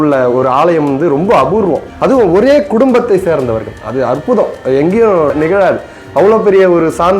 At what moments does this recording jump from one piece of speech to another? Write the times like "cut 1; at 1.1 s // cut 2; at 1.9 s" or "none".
cut 1; at 1.9 s // cut 2; at 5.3 s